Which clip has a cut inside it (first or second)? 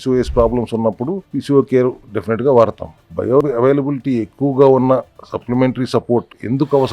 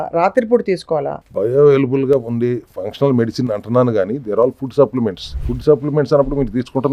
first